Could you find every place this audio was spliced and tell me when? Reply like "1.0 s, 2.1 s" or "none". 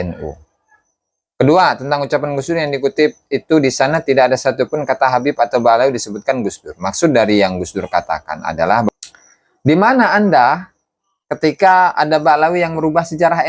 8.9 s